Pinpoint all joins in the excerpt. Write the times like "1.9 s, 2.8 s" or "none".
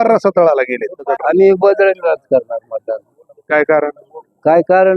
1.0 s

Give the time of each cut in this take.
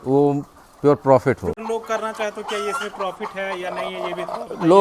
1.6 s

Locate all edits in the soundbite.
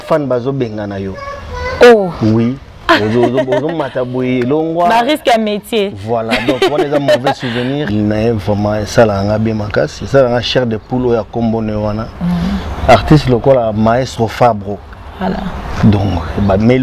7.9 s

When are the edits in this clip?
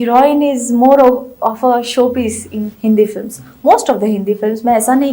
none

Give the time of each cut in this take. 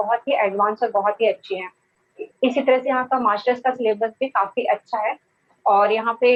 none

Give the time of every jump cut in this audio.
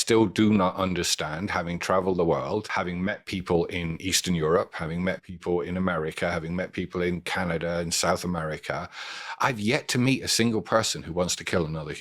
2.7 s

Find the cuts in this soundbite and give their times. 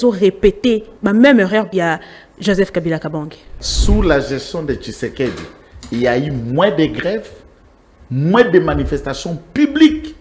0.9 s, 1.7 s, 3.6 s

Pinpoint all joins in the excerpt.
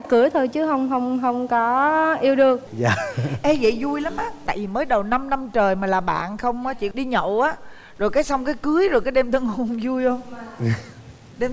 2.7 s

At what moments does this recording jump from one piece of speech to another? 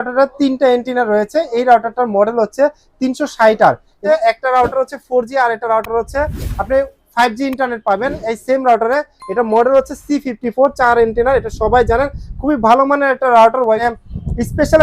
4.0 s, 13.8 s

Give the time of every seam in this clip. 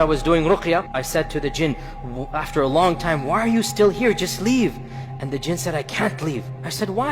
1.0 s

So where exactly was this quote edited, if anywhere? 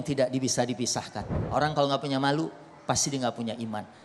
1.4 s

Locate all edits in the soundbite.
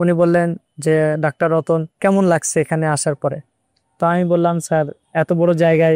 1.9 s, 5.0 s

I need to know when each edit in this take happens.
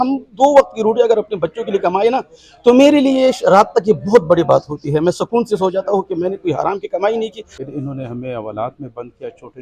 7.5 s

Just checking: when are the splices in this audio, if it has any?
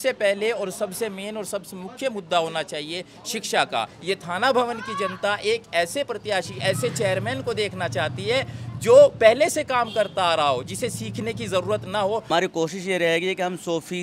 4.0 s, 12.3 s

